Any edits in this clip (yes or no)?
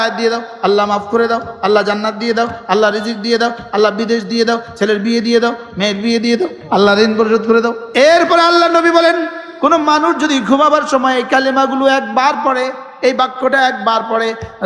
yes